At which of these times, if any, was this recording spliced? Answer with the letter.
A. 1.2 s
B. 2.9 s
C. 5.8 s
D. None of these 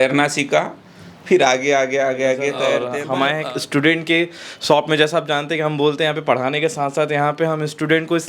B